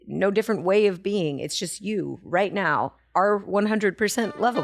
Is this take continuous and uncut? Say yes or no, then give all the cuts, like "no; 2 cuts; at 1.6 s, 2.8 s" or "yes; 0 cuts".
yes; 0 cuts